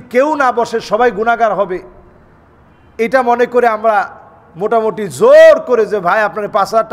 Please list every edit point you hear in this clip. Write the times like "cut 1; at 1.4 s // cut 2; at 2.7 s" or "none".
none

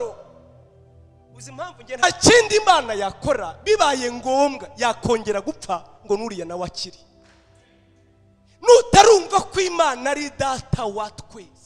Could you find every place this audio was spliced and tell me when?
cut 1; at 2.0 s

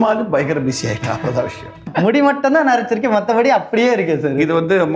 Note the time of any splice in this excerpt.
cut 1; at 1.9 s

